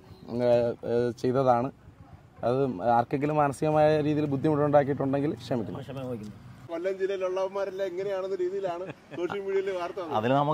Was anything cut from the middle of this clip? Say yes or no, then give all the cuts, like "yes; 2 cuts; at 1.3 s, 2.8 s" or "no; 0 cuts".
yes; 1 cut; at 6.6 s